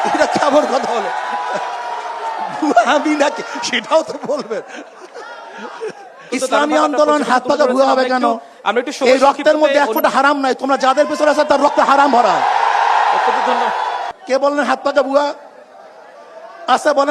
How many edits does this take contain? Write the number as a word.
two